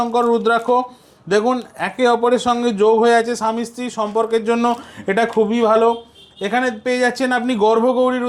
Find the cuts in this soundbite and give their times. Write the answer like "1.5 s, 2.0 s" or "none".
none